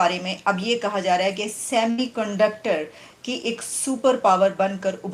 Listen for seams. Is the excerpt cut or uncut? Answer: uncut